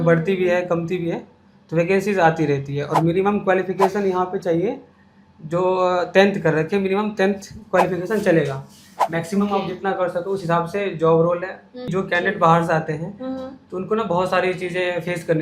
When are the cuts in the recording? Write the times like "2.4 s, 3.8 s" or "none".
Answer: 11.9 s